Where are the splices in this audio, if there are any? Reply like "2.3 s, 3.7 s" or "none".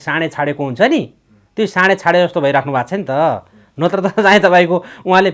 none